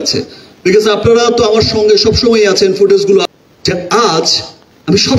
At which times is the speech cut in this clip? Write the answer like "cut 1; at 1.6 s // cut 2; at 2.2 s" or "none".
cut 1; at 3.3 s